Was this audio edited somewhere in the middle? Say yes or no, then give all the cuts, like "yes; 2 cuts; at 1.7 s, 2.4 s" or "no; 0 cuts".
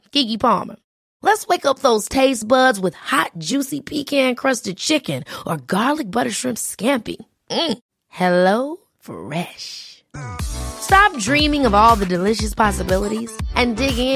no; 0 cuts